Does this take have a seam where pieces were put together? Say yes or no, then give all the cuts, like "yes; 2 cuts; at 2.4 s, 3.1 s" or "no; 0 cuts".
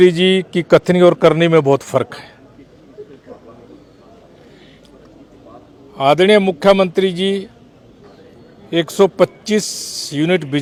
no; 0 cuts